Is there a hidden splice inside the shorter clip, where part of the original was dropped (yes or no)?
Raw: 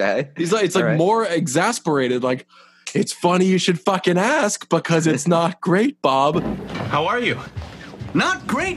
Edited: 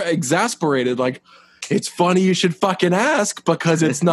no